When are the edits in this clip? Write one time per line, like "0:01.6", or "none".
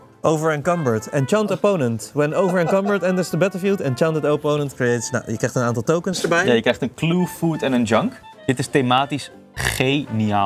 none